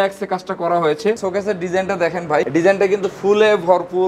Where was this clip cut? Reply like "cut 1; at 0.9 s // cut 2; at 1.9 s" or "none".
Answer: cut 1; at 1.2 s